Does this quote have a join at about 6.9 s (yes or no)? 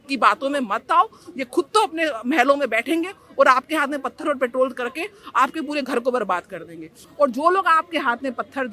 yes